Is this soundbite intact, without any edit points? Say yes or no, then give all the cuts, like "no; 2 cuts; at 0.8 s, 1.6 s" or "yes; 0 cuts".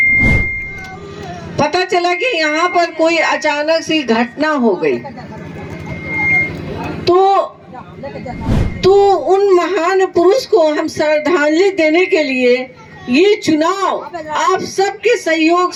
yes; 0 cuts